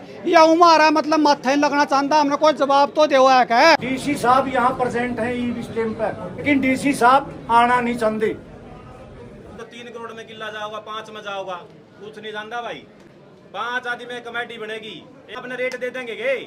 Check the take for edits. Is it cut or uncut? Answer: cut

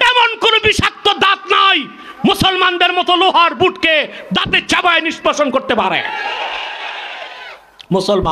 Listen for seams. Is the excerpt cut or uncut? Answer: uncut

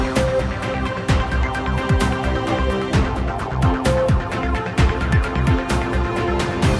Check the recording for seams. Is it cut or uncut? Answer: cut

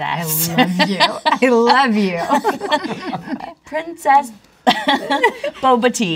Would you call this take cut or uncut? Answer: cut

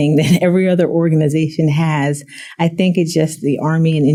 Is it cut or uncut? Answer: uncut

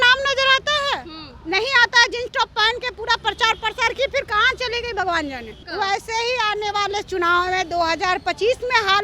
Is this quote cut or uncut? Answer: cut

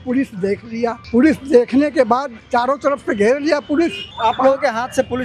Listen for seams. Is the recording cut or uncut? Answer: cut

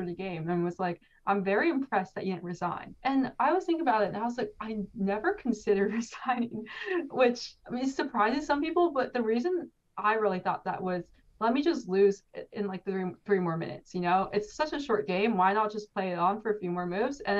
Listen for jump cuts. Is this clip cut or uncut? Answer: uncut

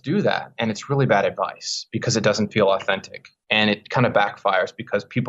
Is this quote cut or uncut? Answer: uncut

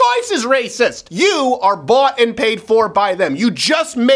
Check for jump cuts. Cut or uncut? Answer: cut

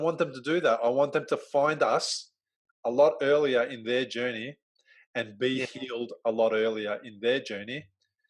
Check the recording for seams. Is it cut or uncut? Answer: uncut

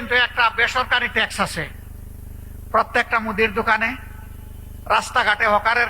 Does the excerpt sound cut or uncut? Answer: uncut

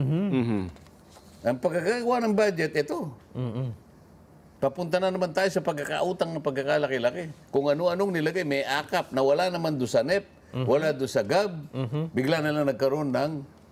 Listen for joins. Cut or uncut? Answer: uncut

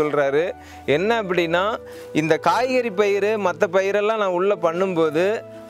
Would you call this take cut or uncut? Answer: uncut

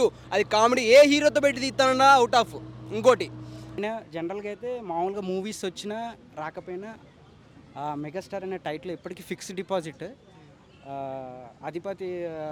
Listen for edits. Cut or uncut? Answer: cut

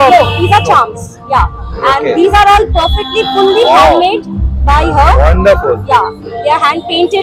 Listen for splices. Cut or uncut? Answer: uncut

